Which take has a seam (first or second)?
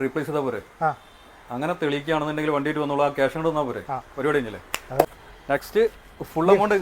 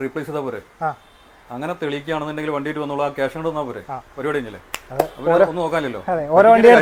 first